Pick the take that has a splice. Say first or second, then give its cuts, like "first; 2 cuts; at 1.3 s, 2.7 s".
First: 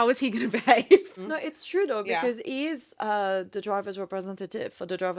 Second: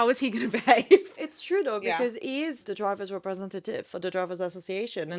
second; 2 cuts; at 1.2 s, 2.6 s